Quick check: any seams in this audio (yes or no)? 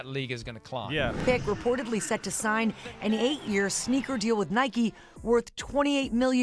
yes